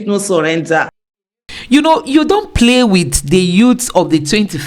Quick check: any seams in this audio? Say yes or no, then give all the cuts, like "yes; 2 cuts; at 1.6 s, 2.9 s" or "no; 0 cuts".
yes; 1 cut; at 1.1 s